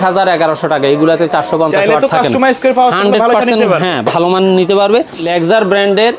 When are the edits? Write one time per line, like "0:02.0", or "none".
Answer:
0:05.3